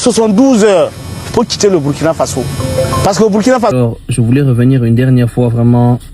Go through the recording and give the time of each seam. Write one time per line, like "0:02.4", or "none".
0:03.7